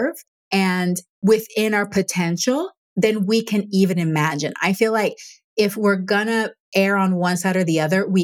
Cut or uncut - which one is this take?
uncut